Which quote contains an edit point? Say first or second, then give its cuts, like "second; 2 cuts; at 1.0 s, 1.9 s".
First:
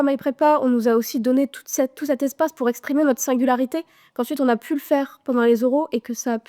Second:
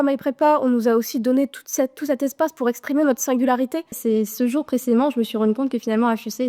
second; 1 cut; at 4.0 s